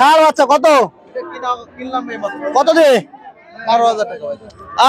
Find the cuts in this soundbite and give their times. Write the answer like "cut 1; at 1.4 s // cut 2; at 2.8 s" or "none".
none

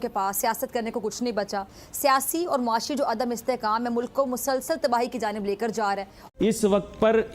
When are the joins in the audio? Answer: cut 1; at 6.1 s

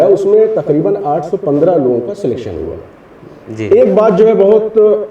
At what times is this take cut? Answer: none

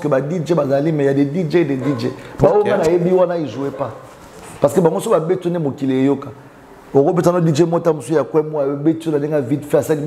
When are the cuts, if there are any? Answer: none

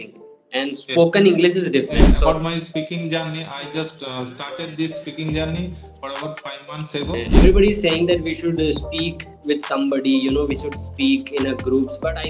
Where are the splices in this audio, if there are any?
cut 1; at 2.1 s // cut 2; at 7.3 s

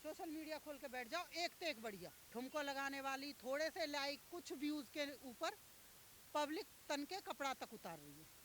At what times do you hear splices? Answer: none

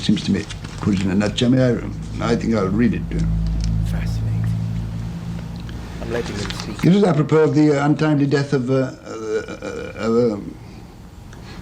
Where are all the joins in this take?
cut 1; at 1.0 s

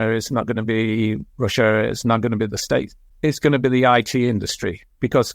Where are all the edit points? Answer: cut 1; at 3.0 s

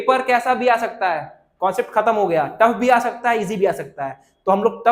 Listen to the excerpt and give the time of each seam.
none

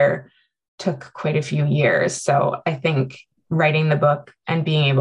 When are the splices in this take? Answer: none

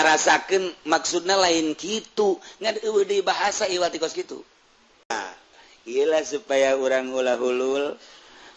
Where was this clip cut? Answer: cut 1; at 5.1 s

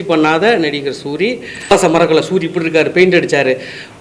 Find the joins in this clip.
cut 1; at 1.7 s

